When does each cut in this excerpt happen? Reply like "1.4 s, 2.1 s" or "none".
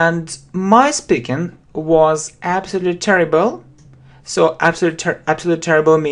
none